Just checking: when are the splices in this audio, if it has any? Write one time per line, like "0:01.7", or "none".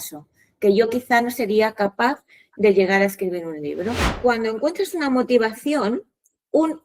0:04.1